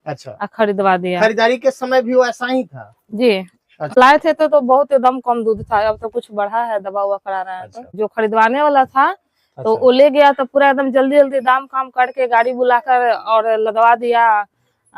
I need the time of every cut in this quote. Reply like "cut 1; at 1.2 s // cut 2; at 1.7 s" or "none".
cut 1; at 4.0 s // cut 2; at 7.9 s